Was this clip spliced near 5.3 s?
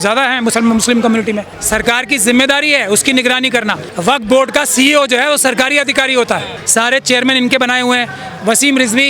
no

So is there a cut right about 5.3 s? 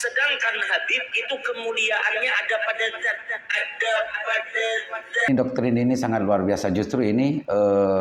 yes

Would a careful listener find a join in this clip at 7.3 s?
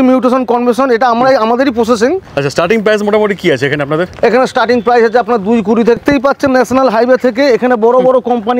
no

